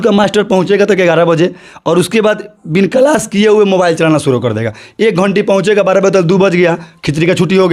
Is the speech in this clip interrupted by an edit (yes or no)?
no